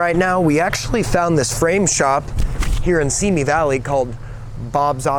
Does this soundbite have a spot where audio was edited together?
no; 0 cuts

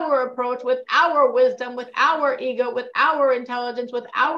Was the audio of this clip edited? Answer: no; 0 cuts

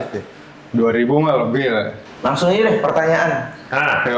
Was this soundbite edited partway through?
yes; 1 cut; at 2.0 s

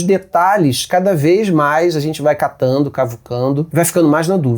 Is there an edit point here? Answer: yes; 1 cut; at 3.7 s

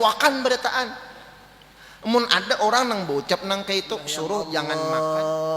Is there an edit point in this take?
yes; 1 cut; at 4.6 s

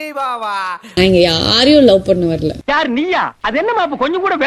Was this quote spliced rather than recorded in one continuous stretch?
yes; 1 cut; at 2.6 s

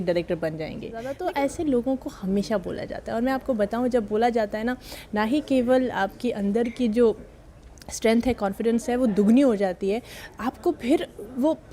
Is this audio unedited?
no; 1 cut; at 1.1 s

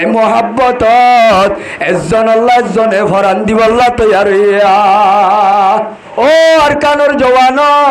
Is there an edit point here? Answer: yes; 1 cut; at 6.0 s

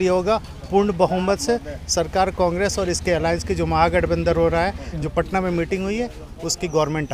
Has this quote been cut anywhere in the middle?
no; 0 cuts

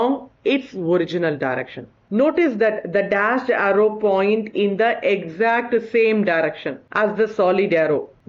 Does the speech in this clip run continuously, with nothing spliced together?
no; 1 cut; at 1.9 s

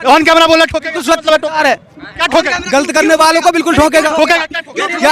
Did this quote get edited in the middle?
no; 0 cuts

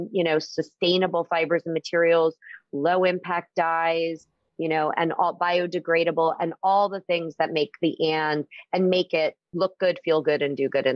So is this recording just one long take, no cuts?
no; 1 cut; at 9.5 s

